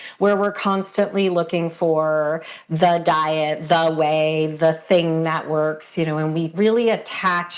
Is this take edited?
yes; 1 cut; at 6.5 s

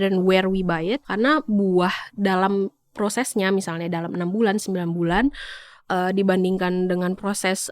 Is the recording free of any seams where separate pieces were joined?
no; 1 cut; at 1.1 s

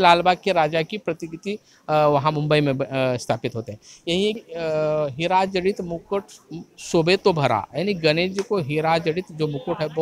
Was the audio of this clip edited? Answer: yes; 1 cut; at 4.4 s

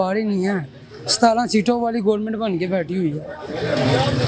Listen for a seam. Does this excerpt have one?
no; 0 cuts

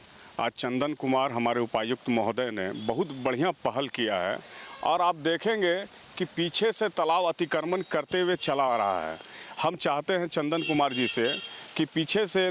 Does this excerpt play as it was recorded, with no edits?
yes; 0 cuts

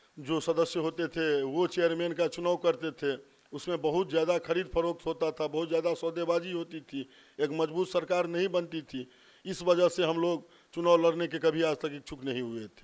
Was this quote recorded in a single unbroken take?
yes; 0 cuts

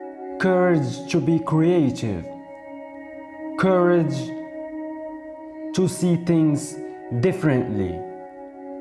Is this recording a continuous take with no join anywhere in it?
no; 2 cuts; at 4.2 s, 5.8 s

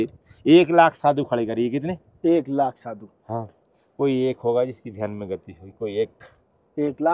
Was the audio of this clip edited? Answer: no; 0 cuts

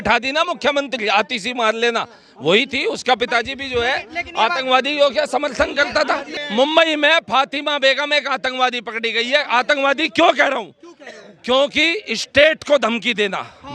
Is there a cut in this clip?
yes; 1 cut; at 6.3 s

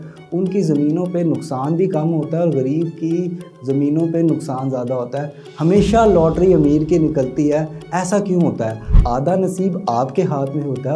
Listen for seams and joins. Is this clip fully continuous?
no; 1 cut; at 8.9 s

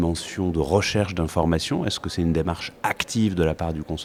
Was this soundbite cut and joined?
no; 0 cuts

